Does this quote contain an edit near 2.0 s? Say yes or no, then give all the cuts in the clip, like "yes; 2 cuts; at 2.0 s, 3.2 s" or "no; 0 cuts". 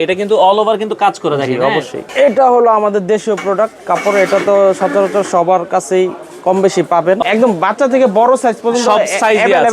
yes; 2 cuts; at 2.0 s, 7.2 s